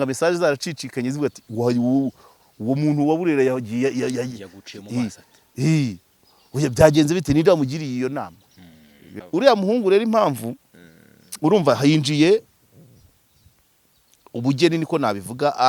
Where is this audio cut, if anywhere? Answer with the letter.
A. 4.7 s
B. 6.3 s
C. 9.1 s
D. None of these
C